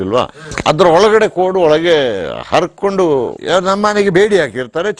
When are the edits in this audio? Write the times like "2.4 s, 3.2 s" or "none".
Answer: 3.4 s